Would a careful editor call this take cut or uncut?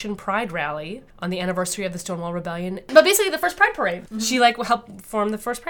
cut